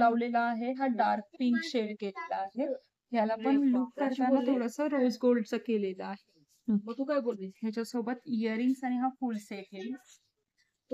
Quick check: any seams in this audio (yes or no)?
no